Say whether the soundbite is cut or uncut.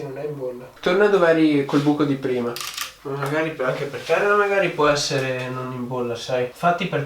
cut